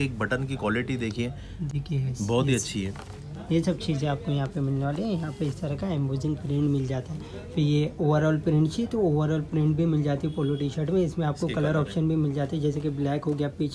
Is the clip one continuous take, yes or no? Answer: yes